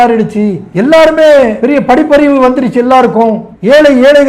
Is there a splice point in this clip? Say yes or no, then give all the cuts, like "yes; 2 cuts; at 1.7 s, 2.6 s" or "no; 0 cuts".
no; 0 cuts